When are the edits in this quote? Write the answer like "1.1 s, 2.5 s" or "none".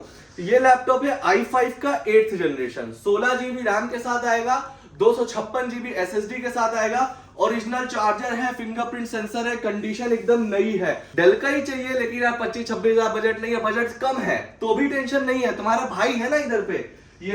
11.0 s